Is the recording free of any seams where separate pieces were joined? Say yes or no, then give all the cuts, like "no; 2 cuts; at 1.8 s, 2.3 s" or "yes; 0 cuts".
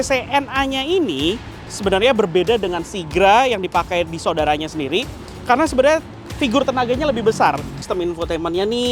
no; 1 cut; at 7.8 s